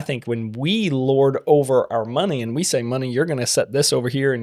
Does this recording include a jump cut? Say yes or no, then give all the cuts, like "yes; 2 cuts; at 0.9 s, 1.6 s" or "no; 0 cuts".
no; 0 cuts